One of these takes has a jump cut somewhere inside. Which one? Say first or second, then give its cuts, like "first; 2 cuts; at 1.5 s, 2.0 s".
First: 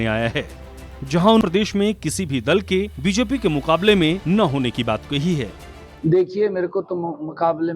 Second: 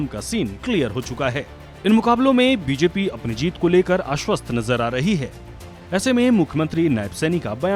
first; 1 cut; at 1.4 s